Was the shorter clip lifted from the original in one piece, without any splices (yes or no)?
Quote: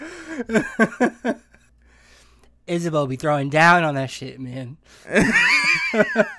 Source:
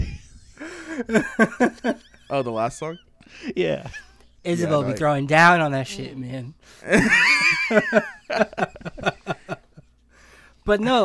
no